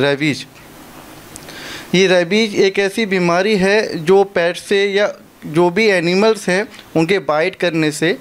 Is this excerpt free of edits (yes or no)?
yes